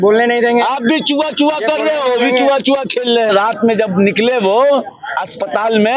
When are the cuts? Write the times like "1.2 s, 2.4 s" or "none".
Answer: 3.3 s